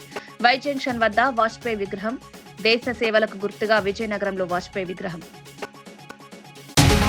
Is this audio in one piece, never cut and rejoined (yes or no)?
no